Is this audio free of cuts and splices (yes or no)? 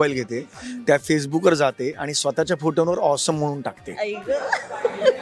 yes